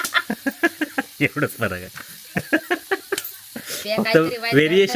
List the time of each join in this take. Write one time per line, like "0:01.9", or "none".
0:03.8